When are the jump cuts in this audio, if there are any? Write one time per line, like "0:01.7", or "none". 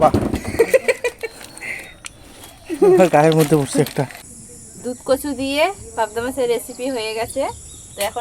0:03.9